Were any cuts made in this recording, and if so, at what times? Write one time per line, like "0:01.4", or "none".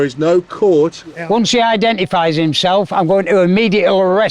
0:01.1